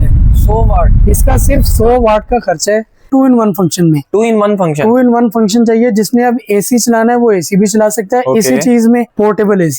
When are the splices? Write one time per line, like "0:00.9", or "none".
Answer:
0:03.1